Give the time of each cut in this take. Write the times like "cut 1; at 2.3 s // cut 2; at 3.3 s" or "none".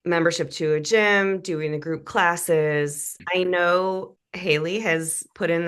cut 1; at 3.2 s